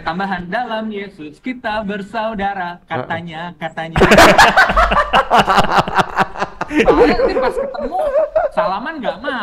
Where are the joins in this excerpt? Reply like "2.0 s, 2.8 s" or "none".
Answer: none